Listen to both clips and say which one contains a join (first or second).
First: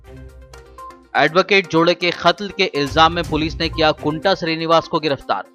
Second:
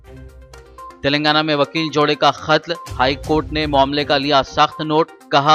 first